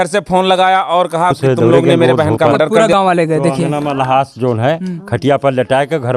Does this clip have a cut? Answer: yes; 1 cut; at 2.8 s

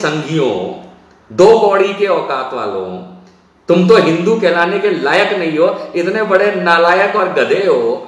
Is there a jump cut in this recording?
no; 0 cuts

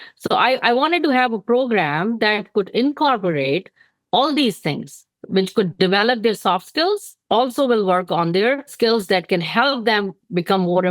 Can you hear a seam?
yes; 1 cut; at 8.7 s

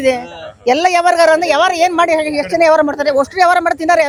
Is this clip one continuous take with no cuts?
yes; 0 cuts

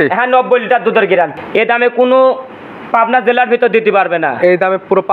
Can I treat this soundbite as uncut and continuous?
no; 1 cut; at 1.3 s

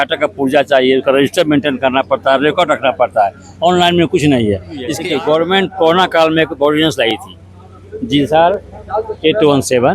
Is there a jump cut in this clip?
yes; 1 cut; at 4.9 s

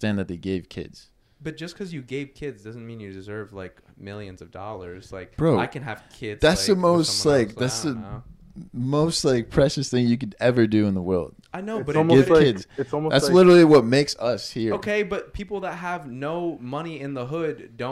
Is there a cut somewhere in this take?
no; 0 cuts

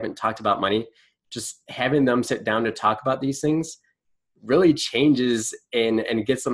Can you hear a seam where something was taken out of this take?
no; 0 cuts

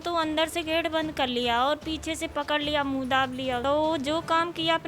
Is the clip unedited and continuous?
no; 1 cut; at 3.6 s

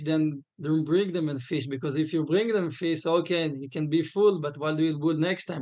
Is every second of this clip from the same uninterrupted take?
yes; 0 cuts

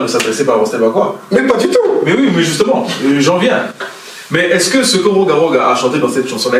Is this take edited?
no; 0 cuts

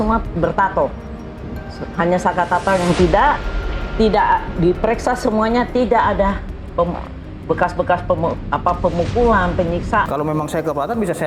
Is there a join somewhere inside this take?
yes; 1 cut; at 10.1 s

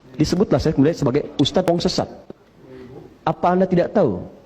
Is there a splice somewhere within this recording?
yes; 1 cut; at 1.7 s

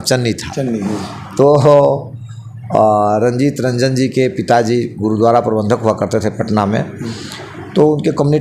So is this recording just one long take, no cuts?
yes; 0 cuts

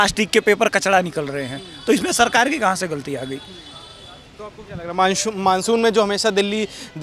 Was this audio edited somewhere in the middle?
no; 0 cuts

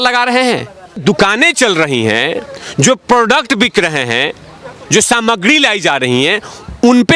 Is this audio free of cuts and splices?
no; 1 cut; at 1.0 s

